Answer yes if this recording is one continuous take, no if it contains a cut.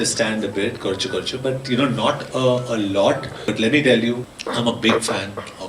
no